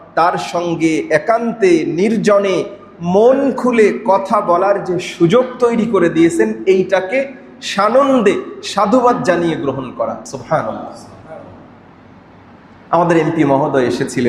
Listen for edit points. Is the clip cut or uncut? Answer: uncut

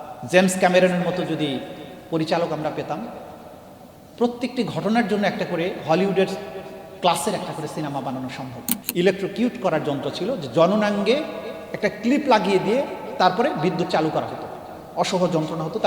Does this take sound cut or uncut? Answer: cut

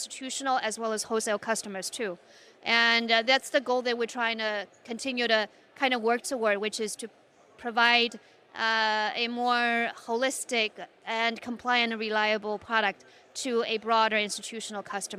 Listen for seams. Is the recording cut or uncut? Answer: uncut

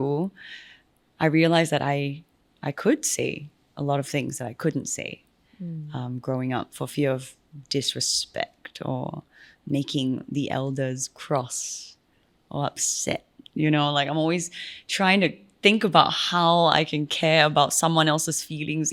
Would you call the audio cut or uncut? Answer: uncut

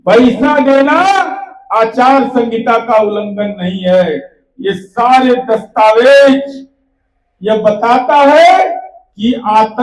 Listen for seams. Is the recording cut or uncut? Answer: uncut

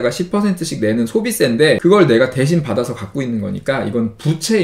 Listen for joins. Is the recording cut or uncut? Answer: cut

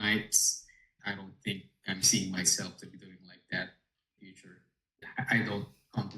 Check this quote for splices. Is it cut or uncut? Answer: cut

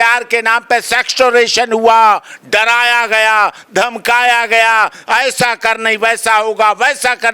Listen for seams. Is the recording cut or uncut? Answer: uncut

